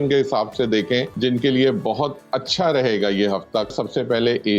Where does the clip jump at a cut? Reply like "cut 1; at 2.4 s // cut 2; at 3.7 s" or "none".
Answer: cut 1; at 1.1 s // cut 2; at 3.7 s

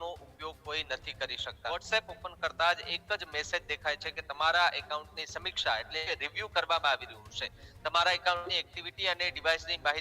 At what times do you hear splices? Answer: cut 1; at 1.6 s

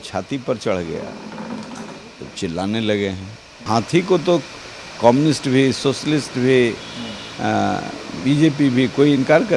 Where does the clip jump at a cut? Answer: cut 1; at 3.7 s

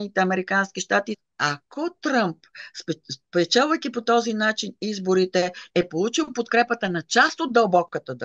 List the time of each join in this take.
cut 1; at 1.2 s

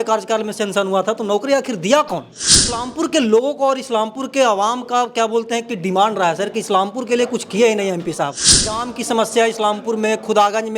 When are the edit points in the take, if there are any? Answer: cut 1; at 2.4 s // cut 2; at 8.7 s

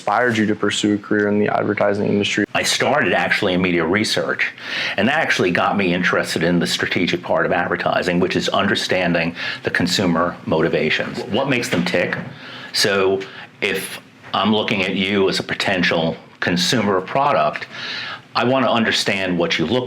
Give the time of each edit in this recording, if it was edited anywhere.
cut 1; at 2.4 s

